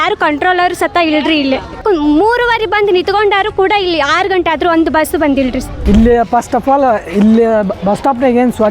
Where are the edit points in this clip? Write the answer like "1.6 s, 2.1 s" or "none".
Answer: none